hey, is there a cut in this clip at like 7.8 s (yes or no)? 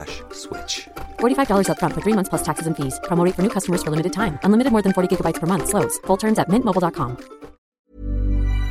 yes